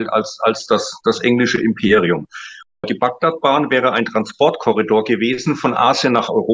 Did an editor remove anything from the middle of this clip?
yes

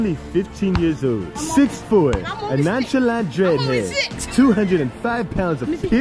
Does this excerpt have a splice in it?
yes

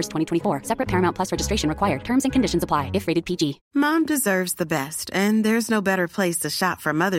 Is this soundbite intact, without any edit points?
no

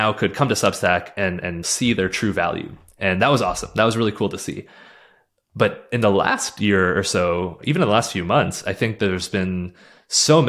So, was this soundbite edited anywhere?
no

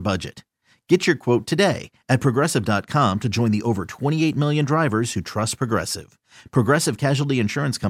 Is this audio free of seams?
yes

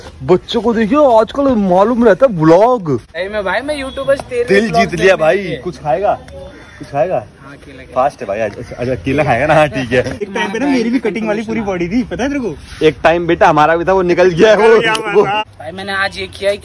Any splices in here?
yes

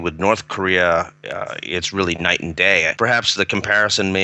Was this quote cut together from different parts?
yes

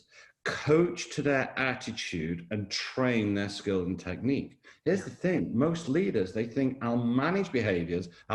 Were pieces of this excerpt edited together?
no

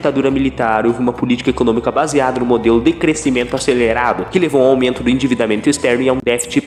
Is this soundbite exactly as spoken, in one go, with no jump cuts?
yes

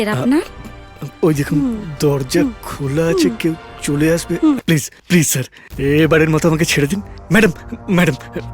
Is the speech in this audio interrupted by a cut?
yes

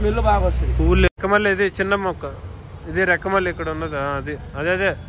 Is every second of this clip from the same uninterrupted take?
no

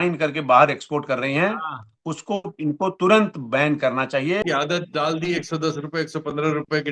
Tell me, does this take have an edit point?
yes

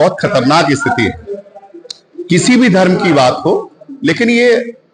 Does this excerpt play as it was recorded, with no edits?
yes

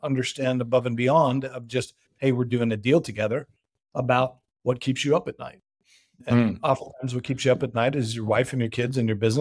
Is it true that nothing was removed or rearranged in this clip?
yes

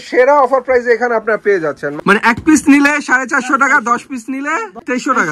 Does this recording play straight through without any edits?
no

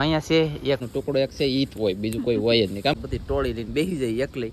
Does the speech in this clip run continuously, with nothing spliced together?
no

